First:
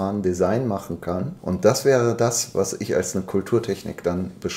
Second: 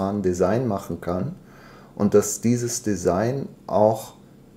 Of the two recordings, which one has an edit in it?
first; 1 cut; at 1.3 s

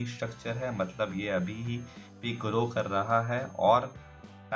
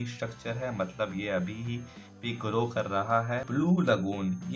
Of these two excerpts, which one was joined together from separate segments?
second; 1 cut; at 3.6 s

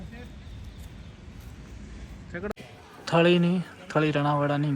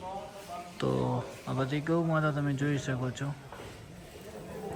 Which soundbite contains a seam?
first; 1 cut; at 2.5 s

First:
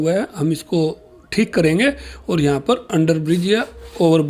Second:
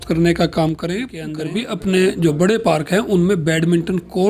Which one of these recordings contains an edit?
second; 1 cut; at 1.3 s

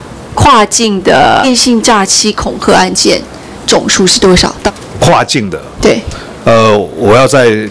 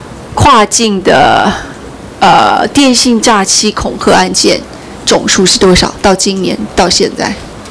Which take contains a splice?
first; 2 cuts; at 1.5 s, 4.6 s

